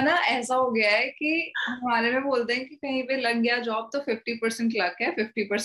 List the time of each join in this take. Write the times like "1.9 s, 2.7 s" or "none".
none

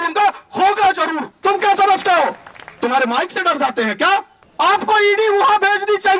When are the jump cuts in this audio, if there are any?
1.3 s, 4.4 s

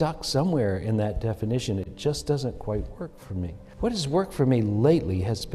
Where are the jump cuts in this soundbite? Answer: 3.6 s

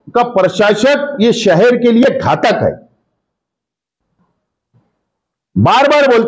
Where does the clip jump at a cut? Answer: none

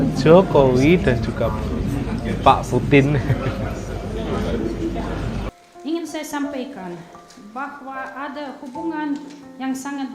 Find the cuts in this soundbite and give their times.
5.5 s

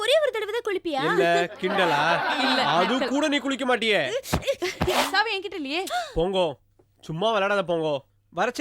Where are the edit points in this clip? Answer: 5.0 s

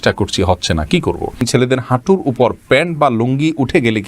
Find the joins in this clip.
1.4 s

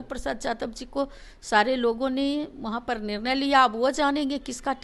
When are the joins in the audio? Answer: none

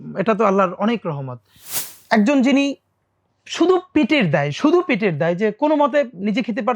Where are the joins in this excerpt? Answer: 1.7 s

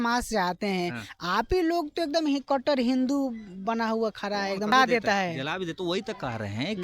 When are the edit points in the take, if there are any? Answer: 4.7 s

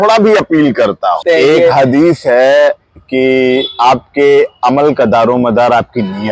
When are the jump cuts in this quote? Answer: 1.2 s

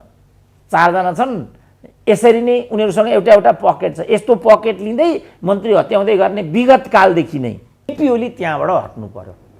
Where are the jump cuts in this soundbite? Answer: 7.9 s

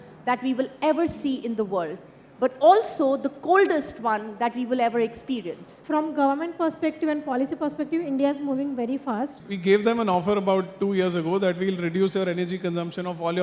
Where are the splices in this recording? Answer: 5.7 s, 9.4 s

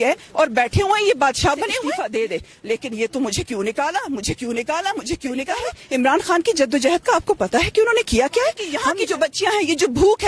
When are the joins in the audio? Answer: 1.8 s, 5.7 s, 8.7 s

